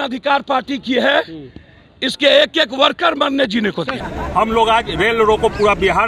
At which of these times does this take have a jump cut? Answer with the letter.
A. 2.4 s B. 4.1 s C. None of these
B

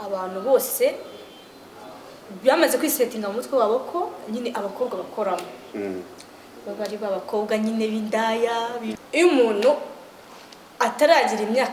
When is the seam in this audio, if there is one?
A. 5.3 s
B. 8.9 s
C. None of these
B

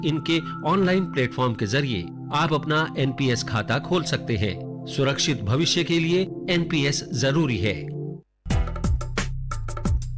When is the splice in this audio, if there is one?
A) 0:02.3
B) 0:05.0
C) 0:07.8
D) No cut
C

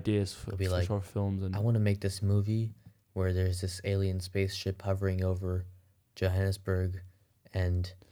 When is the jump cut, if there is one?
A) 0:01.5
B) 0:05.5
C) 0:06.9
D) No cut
A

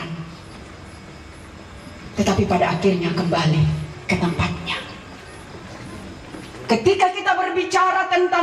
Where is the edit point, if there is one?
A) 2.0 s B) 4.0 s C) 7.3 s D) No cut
D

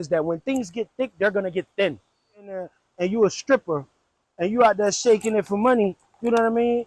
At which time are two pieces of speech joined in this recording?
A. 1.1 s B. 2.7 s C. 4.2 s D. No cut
B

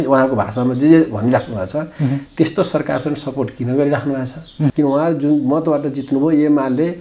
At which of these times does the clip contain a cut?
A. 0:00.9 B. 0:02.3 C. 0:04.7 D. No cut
C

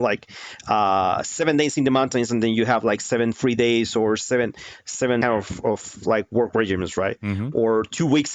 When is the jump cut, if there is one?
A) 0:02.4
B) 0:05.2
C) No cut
B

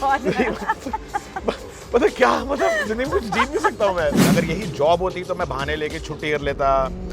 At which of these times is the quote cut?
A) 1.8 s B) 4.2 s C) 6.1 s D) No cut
B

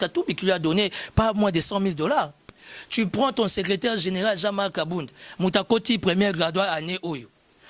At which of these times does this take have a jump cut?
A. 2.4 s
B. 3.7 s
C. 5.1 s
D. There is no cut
A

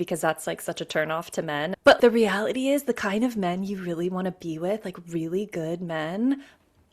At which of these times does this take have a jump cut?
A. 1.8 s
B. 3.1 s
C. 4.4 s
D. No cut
A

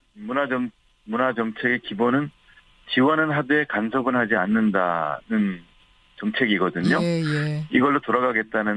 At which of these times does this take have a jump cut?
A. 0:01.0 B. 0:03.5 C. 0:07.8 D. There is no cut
D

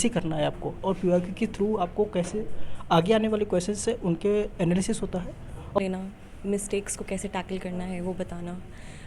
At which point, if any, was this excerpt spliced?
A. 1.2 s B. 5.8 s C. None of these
B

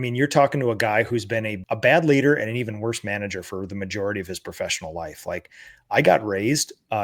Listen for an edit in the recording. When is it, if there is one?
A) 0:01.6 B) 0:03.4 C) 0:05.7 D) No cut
A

